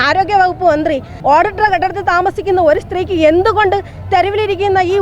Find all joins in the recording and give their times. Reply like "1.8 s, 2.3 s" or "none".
1.1 s

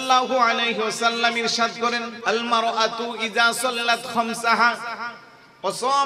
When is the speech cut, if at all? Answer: 2.1 s

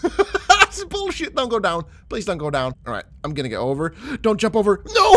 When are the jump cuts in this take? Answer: 2.8 s

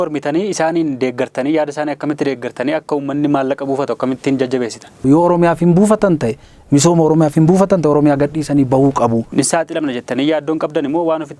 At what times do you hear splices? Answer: 5.0 s, 9.3 s

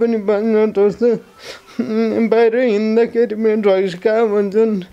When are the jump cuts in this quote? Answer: none

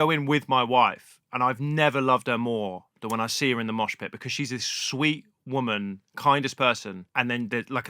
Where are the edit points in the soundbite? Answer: 7.0 s

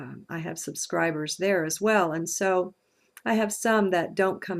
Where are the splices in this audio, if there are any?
2.2 s

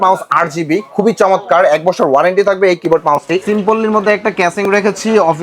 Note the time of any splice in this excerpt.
3.4 s

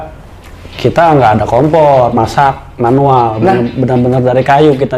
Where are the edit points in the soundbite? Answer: none

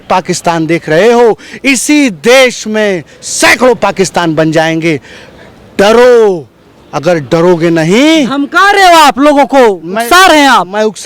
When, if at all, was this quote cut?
none

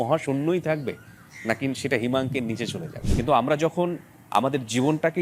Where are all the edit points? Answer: 2.9 s

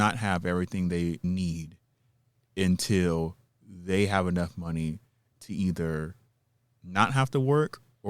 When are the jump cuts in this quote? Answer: 1.2 s

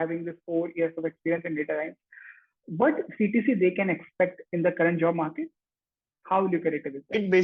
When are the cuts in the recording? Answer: none

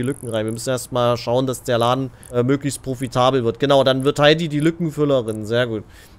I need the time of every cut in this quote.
2.2 s

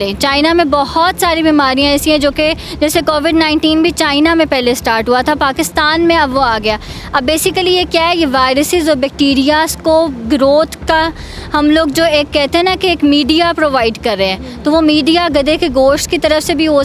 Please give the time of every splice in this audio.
none

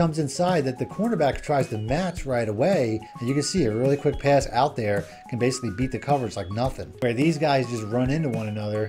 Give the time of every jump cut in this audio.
3.1 s, 6.9 s

